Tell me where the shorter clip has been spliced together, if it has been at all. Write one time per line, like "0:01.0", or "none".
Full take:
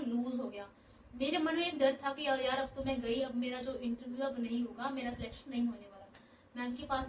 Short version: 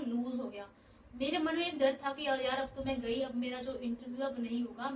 none